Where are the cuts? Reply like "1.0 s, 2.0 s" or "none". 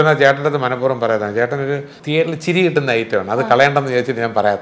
1.9 s